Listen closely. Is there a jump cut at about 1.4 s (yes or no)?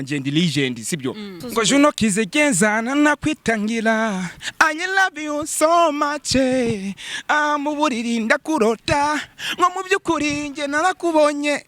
yes